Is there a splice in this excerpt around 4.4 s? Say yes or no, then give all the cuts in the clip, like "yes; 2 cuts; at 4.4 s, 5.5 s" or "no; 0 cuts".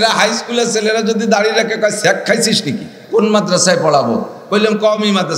no; 1 cut; at 3.0 s